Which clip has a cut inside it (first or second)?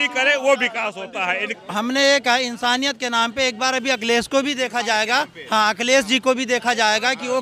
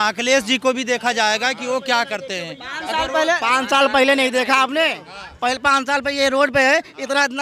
first